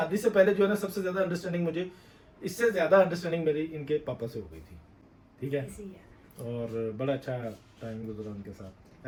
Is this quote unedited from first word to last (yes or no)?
yes